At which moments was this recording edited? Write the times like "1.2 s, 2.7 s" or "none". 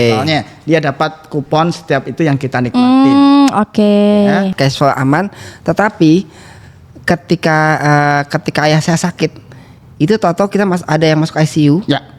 4.5 s